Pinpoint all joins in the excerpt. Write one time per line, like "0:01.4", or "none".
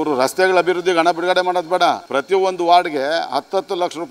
0:02.1